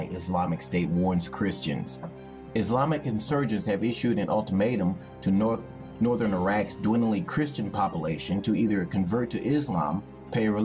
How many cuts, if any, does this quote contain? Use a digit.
1